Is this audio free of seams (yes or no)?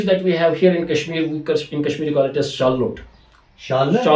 yes